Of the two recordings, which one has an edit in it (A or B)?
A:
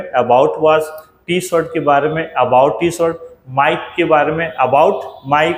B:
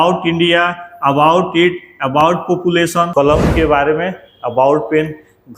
B